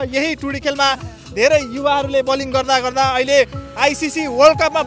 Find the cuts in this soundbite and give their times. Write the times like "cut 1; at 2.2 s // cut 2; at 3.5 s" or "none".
none